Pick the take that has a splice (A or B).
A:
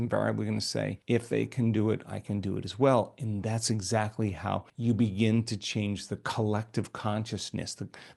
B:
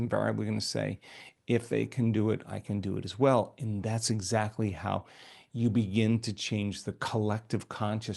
A